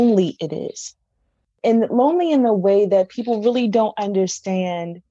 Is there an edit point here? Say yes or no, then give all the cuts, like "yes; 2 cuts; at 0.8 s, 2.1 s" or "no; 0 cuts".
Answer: yes; 1 cut; at 1.6 s